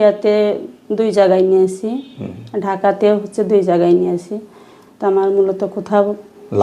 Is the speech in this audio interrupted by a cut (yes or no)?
no